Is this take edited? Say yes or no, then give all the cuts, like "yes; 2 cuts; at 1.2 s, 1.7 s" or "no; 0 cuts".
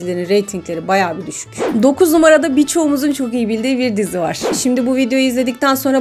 yes; 2 cuts; at 1.4 s, 4.5 s